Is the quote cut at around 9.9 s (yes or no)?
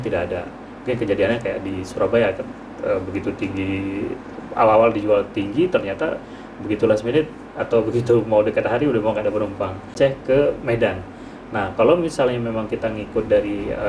yes